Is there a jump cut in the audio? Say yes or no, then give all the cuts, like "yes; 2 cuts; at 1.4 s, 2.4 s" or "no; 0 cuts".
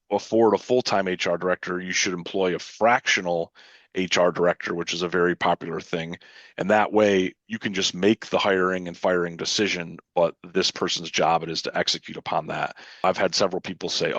yes; 1 cut; at 13.0 s